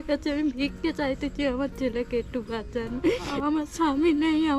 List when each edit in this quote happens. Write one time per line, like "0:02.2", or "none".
0:03.3